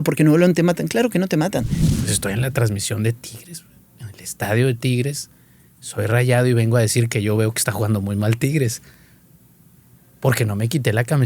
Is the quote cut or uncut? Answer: cut